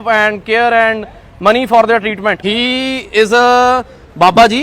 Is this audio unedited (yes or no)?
no